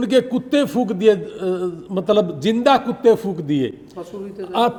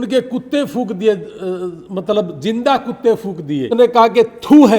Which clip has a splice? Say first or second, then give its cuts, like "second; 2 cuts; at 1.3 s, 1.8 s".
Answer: second; 1 cut; at 3.7 s